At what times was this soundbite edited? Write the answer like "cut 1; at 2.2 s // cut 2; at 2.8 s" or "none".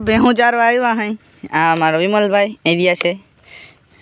none